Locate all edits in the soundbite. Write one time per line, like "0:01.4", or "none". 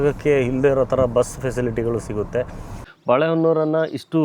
0:02.7